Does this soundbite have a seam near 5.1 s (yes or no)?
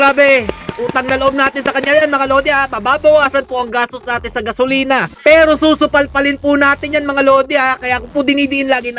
yes